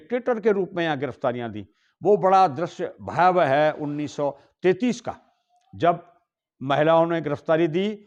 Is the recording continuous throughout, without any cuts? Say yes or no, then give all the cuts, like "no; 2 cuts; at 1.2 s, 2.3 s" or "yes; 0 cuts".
yes; 0 cuts